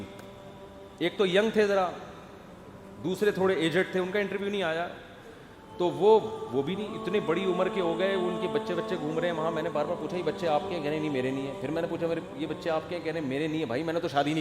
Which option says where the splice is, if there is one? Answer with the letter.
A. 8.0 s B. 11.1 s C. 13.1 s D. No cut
D